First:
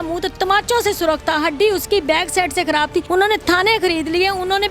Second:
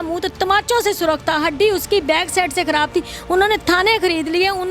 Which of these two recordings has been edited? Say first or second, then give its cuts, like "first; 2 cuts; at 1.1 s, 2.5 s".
first; 1 cut; at 3.1 s